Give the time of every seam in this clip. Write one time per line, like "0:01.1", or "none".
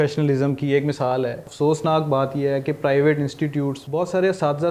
0:01.4
0:03.8